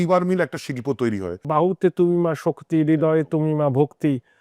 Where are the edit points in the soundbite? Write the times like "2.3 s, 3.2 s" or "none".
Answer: 1.4 s